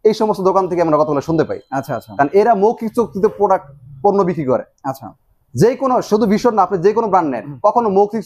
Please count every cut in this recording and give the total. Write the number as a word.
zero